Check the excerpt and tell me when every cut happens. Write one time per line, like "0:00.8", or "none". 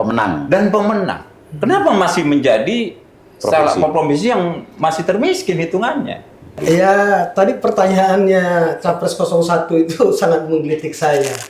0:06.6